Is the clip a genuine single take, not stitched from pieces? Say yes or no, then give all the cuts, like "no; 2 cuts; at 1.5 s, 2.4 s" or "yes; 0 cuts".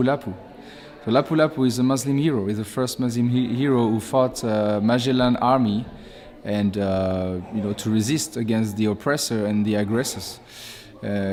yes; 0 cuts